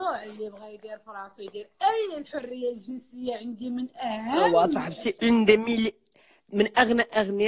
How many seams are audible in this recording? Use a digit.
0